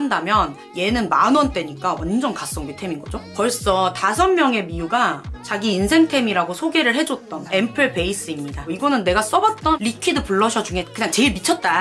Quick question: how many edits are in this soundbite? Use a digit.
2